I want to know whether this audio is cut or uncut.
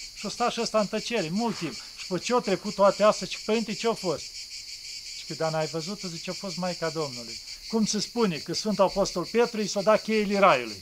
cut